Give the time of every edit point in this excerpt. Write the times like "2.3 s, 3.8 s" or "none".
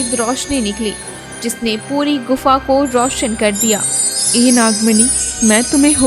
none